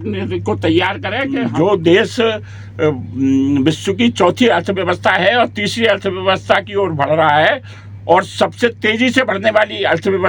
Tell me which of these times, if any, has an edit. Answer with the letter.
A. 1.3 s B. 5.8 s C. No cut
A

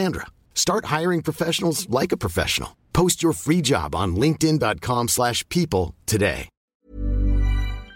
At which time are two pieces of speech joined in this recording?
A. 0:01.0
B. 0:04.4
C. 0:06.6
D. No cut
C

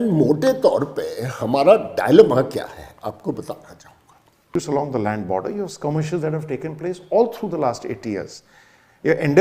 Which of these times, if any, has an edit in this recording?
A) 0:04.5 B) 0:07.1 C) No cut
A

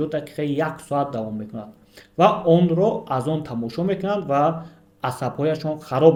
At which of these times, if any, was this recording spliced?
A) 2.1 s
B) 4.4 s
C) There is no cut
C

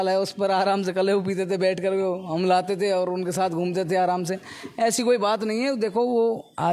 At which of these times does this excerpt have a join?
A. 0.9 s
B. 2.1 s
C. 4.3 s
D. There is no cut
D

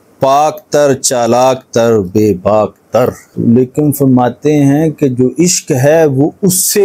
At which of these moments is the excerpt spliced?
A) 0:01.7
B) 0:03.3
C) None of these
B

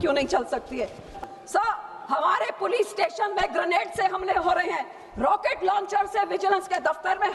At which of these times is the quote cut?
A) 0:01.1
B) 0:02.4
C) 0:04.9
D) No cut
A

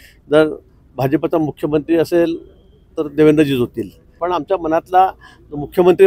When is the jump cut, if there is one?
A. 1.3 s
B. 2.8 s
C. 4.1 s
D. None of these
C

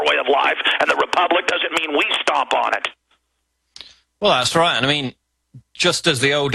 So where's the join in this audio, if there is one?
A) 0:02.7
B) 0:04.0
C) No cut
B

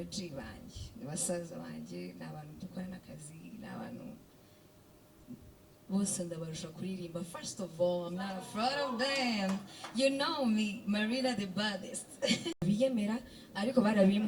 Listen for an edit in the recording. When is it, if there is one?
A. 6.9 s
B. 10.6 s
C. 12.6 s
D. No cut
C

